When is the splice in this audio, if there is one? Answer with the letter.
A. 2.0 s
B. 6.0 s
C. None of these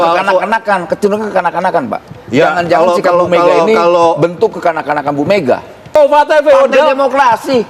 B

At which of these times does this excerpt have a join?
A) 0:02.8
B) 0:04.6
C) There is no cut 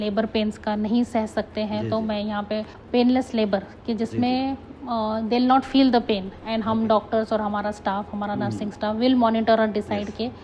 A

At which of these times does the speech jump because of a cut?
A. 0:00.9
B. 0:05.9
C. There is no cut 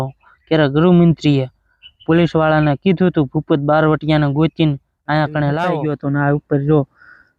B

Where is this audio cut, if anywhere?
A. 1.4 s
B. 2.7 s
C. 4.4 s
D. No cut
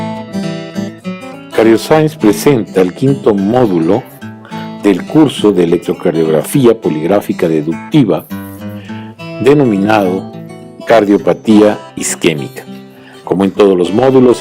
A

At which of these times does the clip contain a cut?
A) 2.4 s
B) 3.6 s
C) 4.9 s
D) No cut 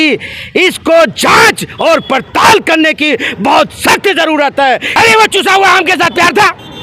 C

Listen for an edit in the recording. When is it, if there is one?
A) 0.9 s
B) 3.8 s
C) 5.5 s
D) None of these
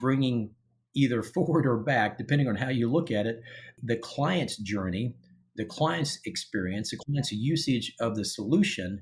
B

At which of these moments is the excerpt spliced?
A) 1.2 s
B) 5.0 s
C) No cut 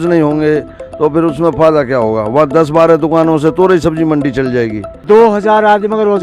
B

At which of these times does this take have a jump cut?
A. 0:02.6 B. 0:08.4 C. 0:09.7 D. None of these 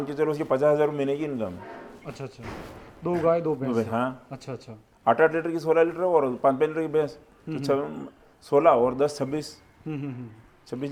D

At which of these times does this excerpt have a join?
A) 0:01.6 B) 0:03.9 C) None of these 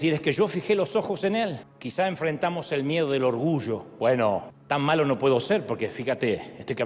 A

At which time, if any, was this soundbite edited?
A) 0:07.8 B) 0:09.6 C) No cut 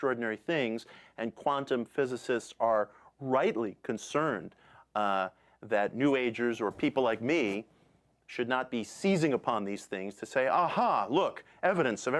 B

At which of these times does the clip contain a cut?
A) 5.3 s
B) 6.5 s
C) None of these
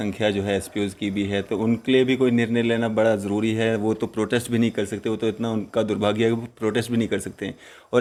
C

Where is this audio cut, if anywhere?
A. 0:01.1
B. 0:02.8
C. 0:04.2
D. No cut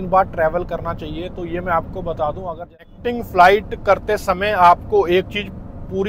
B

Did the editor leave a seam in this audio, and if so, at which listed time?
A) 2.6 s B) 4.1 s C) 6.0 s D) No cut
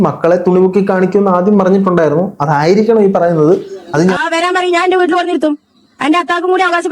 B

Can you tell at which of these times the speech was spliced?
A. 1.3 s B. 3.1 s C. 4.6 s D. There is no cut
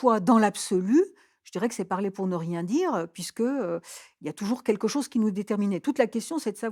D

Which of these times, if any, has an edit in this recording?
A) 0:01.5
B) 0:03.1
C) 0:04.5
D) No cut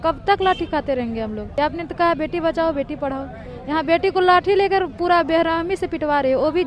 A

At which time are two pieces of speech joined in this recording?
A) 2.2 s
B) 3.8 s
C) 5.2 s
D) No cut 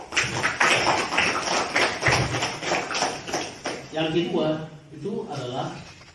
B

